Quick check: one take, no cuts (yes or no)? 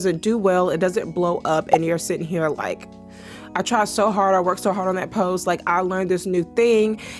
yes